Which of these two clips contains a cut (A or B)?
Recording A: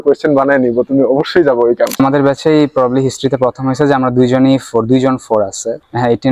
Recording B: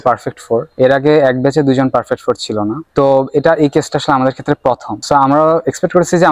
A